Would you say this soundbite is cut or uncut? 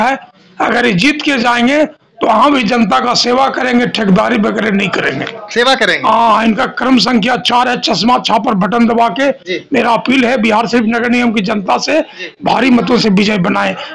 uncut